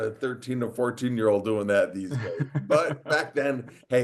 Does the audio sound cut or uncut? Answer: uncut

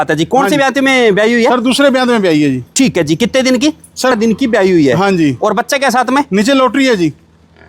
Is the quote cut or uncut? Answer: cut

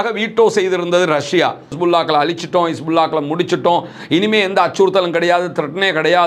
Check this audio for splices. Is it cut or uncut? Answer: cut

